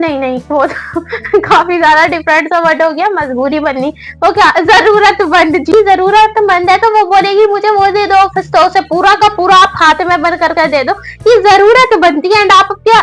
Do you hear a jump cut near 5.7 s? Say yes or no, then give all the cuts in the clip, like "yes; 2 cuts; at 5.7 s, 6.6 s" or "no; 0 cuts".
yes; 1 cut; at 5.7 s